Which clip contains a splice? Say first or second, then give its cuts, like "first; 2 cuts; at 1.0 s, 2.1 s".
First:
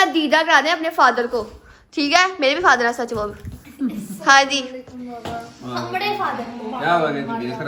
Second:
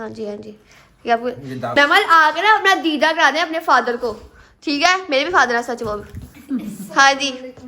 second; 1 cut; at 1.7 s